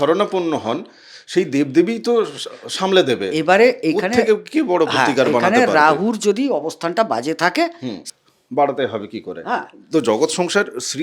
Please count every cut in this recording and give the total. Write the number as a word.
one